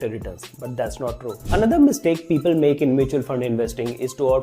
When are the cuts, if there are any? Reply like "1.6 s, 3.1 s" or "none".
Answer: 1.4 s